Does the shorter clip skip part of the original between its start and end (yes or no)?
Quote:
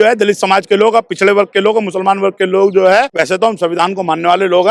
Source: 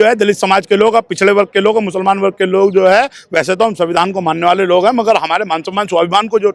yes